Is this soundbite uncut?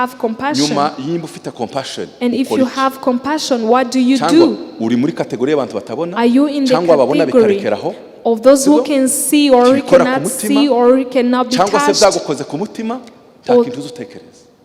yes; 0 cuts

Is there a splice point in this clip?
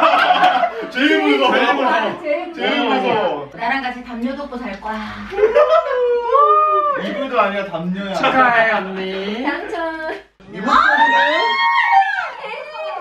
no; 0 cuts

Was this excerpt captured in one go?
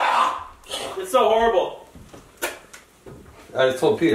yes; 0 cuts

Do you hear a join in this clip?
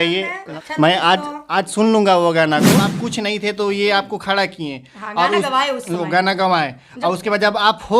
yes; 1 cut; at 2.8 s

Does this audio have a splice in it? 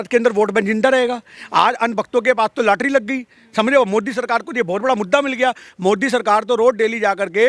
no; 0 cuts

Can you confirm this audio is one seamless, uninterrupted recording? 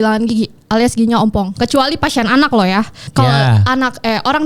no; 1 cut; at 3.0 s

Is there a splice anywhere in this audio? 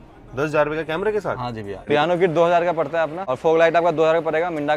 yes; 2 cuts; at 1.8 s, 3.3 s

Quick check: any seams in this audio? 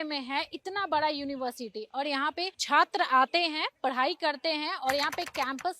yes; 1 cut; at 2.6 s

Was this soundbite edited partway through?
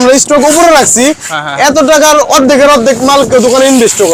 no; 0 cuts

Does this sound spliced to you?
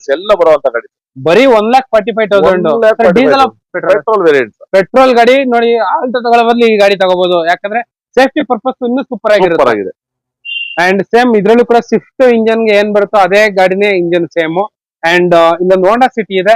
no; 0 cuts

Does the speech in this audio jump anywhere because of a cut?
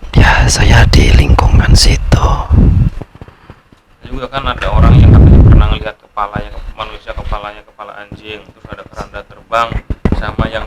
yes; 1 cut; at 2.9 s

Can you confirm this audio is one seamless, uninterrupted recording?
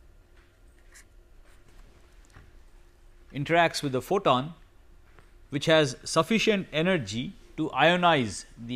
yes; 0 cuts

